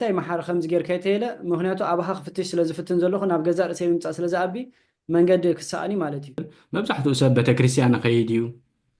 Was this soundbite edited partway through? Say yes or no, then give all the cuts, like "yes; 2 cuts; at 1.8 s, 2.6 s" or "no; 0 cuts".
yes; 1 cut; at 6.6 s